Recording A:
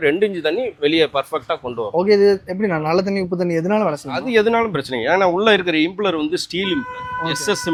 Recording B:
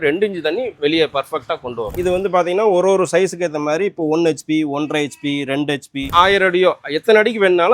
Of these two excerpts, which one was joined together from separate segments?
B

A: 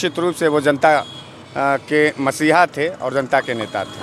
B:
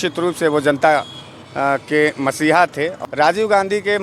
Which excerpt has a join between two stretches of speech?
B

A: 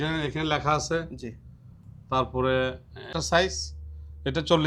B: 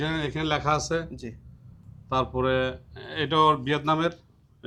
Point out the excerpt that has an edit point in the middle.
A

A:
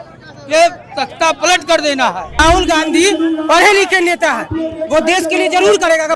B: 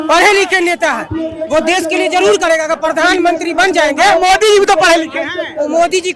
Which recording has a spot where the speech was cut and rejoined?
A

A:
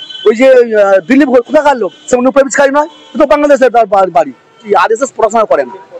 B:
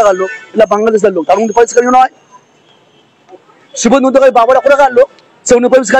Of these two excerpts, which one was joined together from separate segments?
A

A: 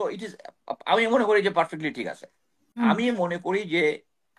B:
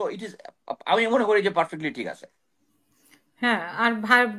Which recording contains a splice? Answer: A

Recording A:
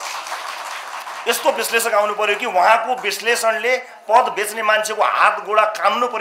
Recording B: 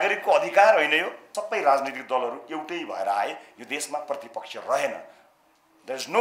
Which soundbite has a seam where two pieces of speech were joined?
B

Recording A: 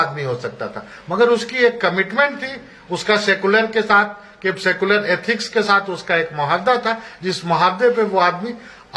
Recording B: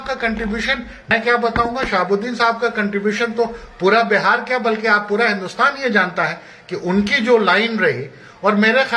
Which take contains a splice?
B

